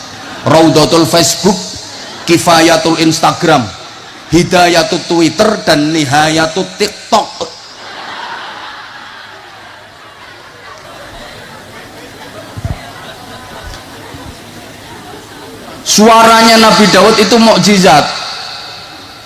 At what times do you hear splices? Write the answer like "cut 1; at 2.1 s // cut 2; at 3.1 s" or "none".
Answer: cut 1; at 10.9 s